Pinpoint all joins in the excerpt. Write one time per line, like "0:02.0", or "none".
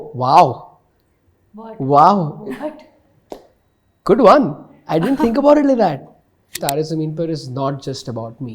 0:06.5